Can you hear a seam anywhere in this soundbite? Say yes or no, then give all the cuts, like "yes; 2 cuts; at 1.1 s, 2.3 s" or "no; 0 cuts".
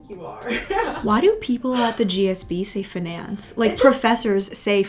no; 0 cuts